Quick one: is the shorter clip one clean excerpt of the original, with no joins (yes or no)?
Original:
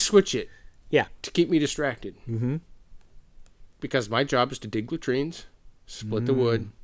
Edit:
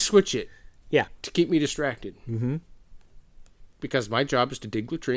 yes